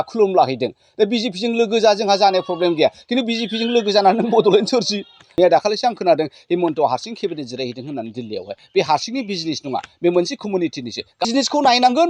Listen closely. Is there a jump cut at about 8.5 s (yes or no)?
no